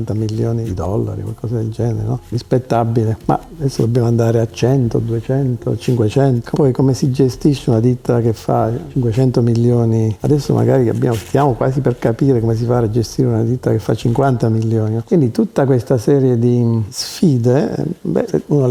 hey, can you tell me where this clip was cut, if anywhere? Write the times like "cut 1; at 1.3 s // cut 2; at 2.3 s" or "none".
none